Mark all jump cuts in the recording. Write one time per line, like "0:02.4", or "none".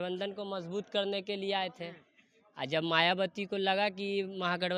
none